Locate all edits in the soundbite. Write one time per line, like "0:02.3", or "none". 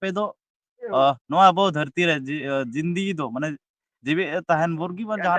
none